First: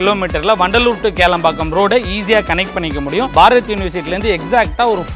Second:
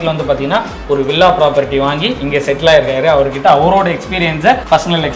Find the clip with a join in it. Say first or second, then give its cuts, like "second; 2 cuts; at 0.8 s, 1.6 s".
first; 1 cut; at 3.3 s